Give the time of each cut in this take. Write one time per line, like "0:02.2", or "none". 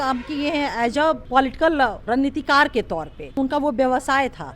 0:01.2
0:02.0
0:03.4